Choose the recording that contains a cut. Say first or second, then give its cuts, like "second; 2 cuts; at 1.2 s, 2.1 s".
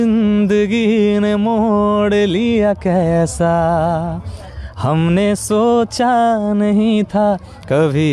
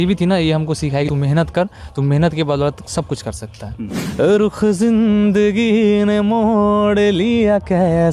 second; 2 cuts; at 1.1 s, 3.9 s